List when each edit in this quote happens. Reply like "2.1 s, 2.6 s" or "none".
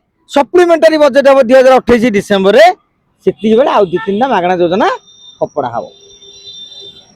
none

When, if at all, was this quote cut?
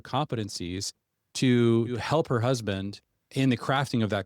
2.0 s, 3.3 s

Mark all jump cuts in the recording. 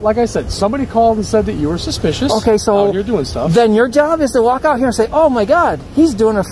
none

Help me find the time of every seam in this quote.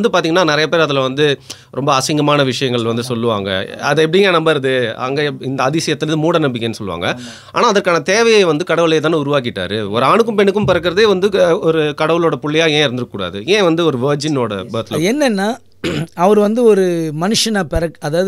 none

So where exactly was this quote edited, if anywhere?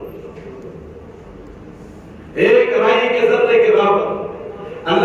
none

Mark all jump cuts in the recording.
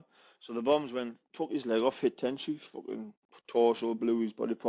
none

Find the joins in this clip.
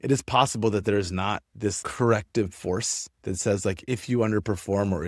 none

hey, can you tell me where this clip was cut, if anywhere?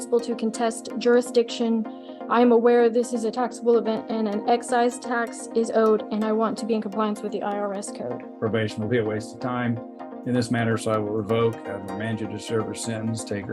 8.3 s

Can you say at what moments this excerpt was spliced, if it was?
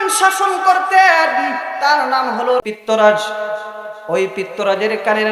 2.6 s

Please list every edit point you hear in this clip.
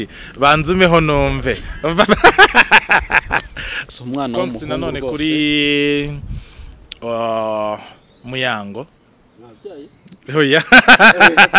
3.8 s

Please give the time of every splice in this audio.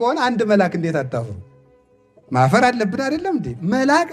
none

